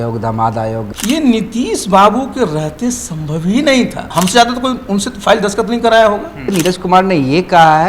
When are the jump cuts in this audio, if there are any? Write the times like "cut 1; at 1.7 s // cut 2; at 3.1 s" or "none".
cut 1; at 0.9 s // cut 2; at 4.0 s // cut 3; at 6.5 s